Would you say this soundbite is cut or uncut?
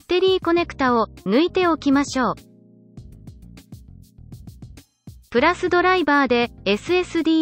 cut